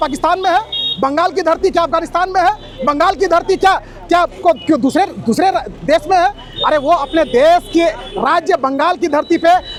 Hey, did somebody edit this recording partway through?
no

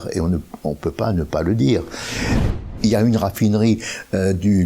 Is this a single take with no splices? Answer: no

